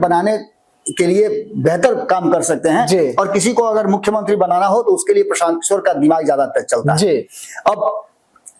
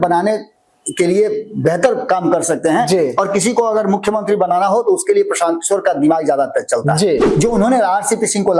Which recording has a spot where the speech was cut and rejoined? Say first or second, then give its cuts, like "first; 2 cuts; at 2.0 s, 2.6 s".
second; 1 cut; at 7.3 s